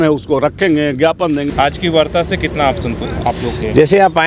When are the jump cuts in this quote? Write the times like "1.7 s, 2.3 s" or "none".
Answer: 1.5 s